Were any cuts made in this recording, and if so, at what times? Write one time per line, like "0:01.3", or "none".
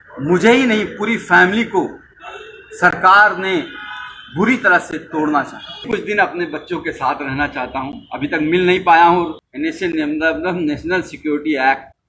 0:05.9
0:09.4